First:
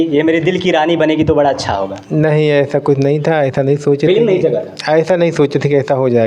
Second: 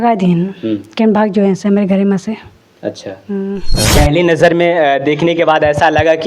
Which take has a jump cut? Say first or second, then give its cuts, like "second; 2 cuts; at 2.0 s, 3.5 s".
second; 1 cut; at 3.8 s